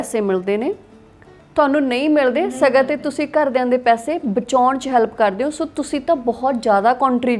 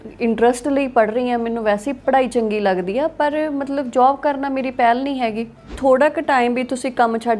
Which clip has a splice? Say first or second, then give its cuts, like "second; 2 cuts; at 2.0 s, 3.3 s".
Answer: second; 1 cut; at 5.7 s